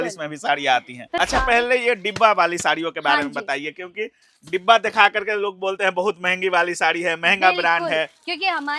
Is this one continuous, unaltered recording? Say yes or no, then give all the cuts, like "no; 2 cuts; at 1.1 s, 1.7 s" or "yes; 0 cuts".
no; 1 cut; at 1.1 s